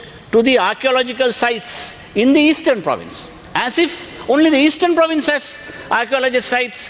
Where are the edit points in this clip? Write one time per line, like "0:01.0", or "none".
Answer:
none